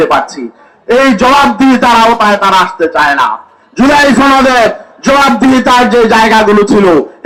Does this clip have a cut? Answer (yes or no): no